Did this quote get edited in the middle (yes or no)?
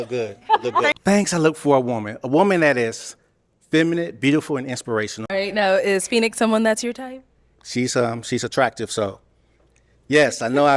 yes